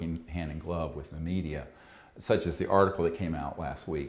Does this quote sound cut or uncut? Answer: uncut